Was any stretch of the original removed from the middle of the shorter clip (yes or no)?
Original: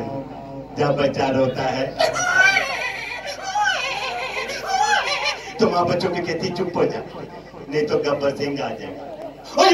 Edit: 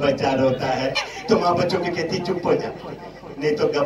yes